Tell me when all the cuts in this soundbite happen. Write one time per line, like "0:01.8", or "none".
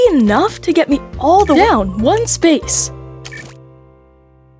0:01.6
0:02.6